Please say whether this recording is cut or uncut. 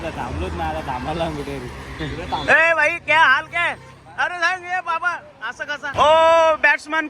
cut